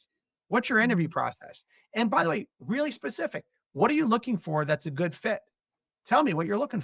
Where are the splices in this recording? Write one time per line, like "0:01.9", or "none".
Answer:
none